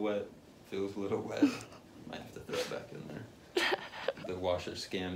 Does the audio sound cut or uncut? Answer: uncut